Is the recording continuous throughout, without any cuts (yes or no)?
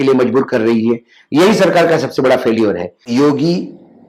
no